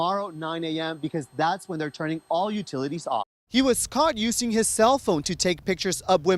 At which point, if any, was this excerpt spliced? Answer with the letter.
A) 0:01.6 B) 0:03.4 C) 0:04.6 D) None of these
B